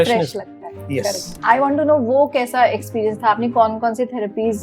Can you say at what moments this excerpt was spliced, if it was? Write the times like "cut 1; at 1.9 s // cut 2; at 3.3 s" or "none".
cut 1; at 1.3 s